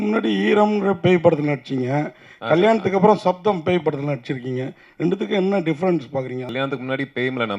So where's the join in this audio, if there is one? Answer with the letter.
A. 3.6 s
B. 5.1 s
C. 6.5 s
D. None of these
C